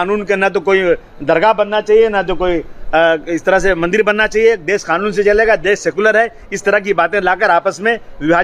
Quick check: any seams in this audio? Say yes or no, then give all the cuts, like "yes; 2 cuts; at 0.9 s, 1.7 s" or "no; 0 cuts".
no; 0 cuts